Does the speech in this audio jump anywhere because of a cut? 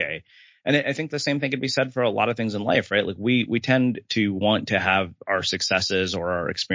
no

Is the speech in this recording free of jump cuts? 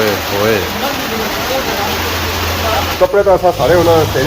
no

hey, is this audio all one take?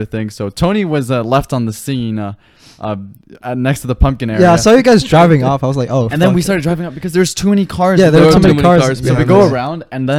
yes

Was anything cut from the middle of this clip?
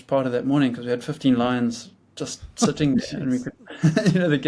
no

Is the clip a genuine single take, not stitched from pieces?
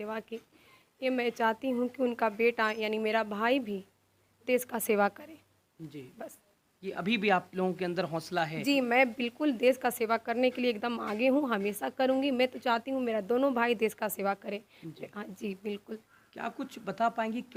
yes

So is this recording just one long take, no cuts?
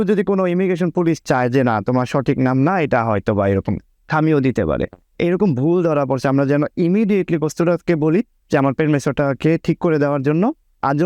no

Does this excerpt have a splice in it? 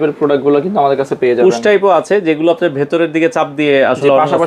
no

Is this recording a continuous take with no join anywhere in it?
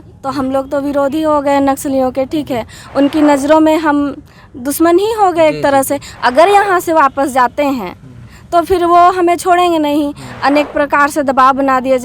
yes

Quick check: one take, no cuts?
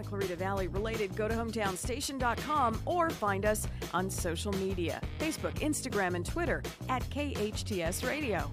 yes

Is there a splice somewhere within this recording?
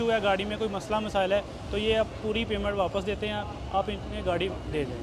no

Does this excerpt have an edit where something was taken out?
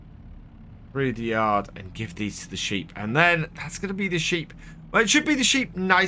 no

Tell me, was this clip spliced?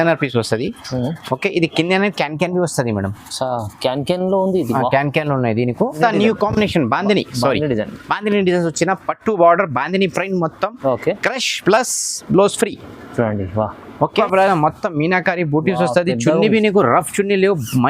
yes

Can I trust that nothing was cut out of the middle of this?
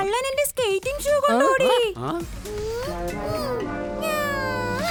yes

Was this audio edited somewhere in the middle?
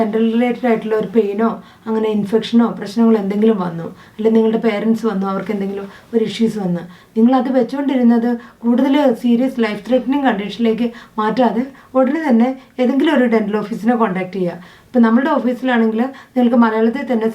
no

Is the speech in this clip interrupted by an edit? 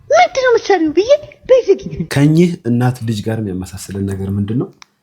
yes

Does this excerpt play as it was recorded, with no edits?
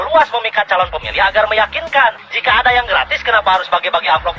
no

